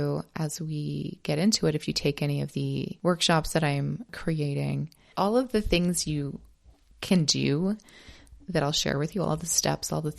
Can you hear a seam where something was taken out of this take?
yes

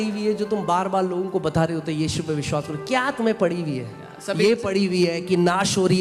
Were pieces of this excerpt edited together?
no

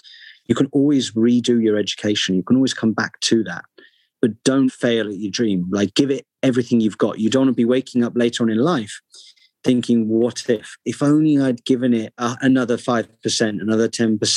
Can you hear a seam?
yes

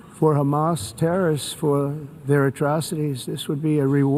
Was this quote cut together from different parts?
no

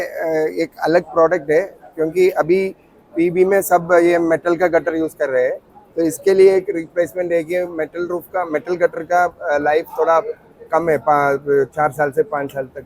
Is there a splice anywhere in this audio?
no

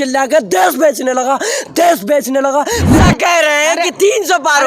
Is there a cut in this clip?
yes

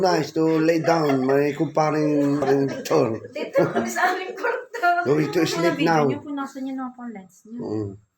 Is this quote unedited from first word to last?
no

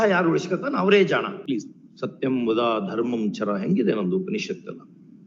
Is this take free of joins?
no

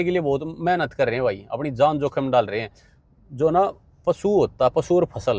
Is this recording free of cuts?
yes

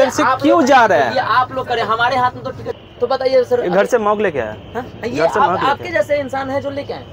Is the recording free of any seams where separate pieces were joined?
no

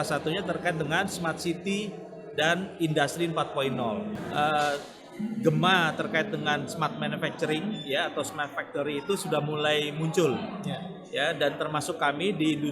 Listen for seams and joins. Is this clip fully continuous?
no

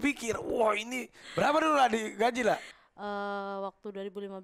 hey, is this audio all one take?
no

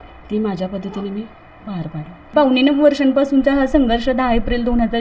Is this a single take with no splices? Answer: no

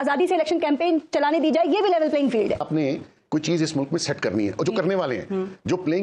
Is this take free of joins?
no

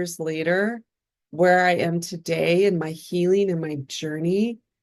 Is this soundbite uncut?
yes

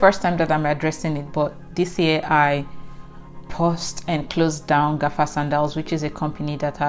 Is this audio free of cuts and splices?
yes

